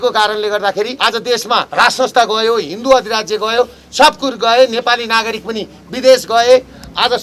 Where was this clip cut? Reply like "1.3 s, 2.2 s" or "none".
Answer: 0.9 s, 1.7 s